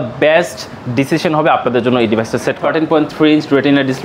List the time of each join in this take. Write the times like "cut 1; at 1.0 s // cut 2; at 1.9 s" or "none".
cut 1; at 2.6 s